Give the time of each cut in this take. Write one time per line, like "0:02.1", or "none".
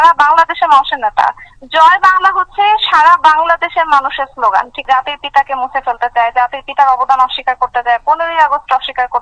0:04.8